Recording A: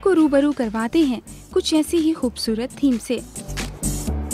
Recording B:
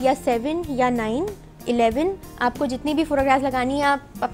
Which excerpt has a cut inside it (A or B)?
A